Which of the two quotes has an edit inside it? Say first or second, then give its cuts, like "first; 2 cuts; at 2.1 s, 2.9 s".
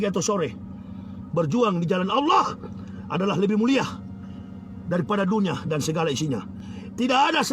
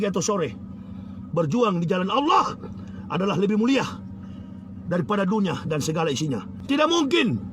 second; 1 cut; at 6.5 s